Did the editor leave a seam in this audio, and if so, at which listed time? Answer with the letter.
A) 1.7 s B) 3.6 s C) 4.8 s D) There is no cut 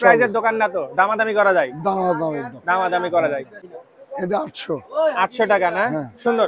B